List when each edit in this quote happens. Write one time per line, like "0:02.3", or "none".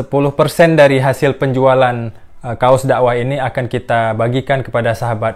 none